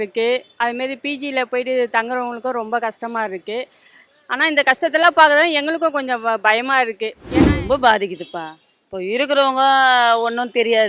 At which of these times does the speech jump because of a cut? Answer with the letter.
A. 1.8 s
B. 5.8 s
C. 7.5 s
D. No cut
C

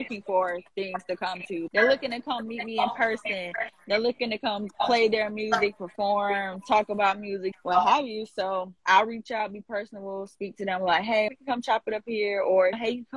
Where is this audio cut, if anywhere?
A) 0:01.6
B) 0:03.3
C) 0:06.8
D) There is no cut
A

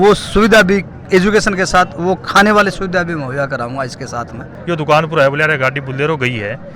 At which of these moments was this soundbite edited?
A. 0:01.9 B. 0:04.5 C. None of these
B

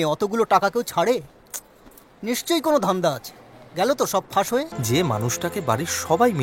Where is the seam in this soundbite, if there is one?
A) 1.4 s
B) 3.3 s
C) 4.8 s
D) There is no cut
C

